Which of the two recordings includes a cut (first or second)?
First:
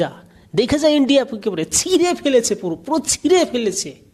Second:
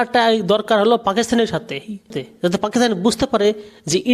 second